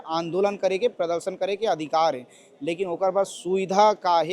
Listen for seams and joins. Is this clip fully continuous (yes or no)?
yes